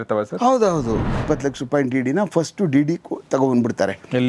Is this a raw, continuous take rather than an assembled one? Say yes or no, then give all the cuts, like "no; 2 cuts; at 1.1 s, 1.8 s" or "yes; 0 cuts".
no; 1 cut; at 1.1 s